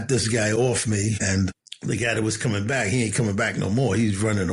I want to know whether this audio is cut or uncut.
cut